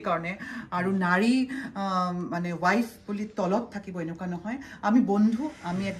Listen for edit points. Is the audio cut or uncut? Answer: uncut